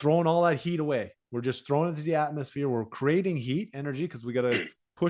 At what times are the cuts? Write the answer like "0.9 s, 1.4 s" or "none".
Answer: none